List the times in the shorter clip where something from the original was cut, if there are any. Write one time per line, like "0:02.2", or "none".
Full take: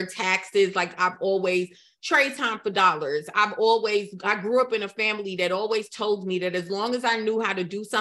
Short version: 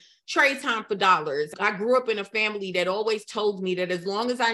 0:01.5